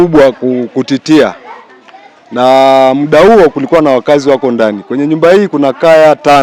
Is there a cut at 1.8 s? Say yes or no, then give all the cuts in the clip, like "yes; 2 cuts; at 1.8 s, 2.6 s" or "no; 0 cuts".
no; 0 cuts